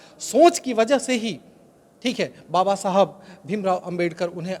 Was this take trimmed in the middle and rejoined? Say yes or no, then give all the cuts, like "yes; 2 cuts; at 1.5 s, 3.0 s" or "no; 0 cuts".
no; 0 cuts